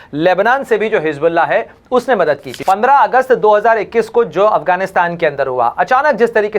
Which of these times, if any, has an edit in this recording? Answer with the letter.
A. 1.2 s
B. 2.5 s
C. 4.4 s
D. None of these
B